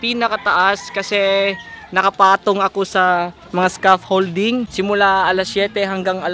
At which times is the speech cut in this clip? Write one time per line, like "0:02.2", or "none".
0:04.7